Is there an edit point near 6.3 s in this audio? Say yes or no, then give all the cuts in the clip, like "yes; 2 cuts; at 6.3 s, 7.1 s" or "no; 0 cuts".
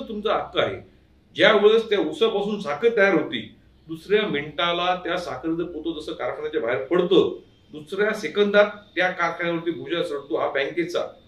no; 0 cuts